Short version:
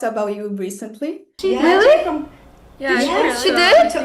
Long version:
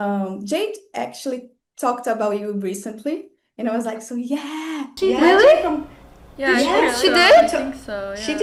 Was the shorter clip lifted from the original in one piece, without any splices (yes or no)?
no